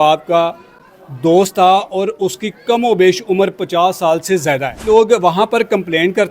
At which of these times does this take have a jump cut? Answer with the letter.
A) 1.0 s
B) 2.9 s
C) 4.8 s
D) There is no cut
C